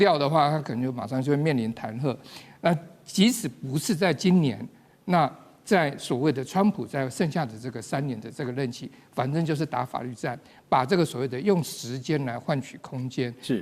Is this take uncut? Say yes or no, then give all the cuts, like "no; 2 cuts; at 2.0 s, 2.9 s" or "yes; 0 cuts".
yes; 0 cuts